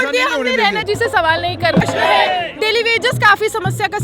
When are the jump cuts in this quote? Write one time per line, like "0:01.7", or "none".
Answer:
0:01.8